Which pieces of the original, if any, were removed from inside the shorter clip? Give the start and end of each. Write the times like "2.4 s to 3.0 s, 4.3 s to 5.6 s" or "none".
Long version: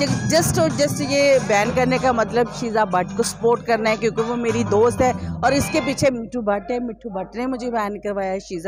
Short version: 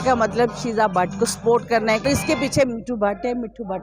4.0 s to 5.5 s